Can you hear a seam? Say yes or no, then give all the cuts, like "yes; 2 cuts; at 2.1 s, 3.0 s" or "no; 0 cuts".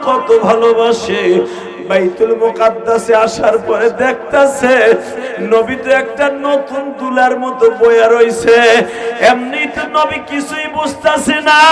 no; 0 cuts